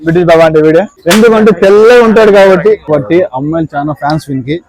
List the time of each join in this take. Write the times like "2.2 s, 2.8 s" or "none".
0.9 s, 2.9 s